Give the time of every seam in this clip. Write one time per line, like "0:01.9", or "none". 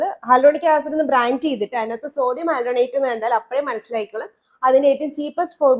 none